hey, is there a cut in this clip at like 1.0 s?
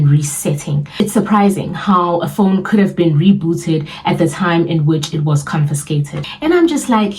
yes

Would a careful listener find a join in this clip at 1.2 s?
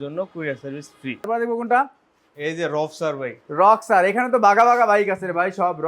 yes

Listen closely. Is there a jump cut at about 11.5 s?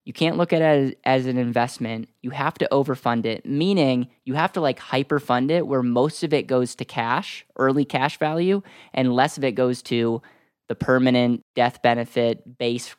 yes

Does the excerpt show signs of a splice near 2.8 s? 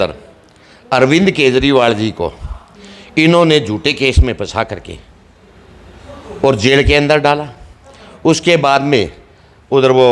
no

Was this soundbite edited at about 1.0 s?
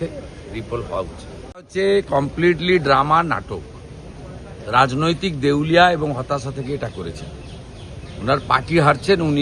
yes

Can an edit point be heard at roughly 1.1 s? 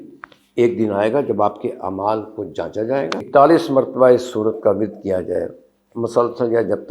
no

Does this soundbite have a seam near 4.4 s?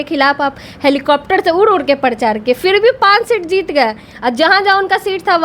no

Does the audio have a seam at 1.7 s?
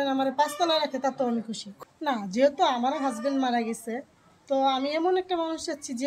yes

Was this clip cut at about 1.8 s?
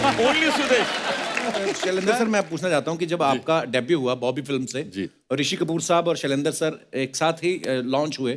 yes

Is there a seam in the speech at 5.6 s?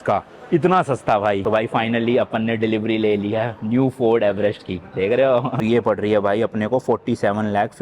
yes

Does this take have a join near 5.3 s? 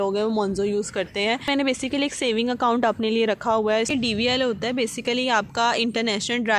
no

